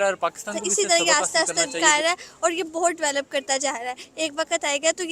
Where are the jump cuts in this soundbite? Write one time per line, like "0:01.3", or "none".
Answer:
0:00.9